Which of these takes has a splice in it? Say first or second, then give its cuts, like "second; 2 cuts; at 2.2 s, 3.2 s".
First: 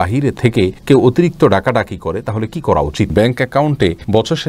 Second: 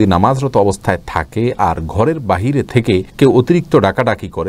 first; 1 cut; at 3.1 s